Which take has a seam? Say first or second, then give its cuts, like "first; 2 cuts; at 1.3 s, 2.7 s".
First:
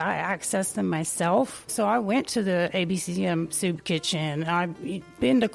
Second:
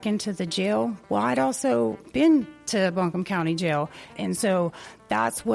second; 2 cuts; at 1.0 s, 4.1 s